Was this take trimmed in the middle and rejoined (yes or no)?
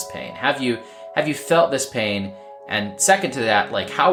no